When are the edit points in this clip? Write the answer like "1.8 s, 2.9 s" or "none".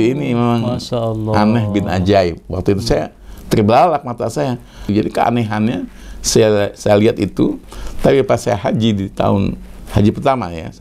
4.8 s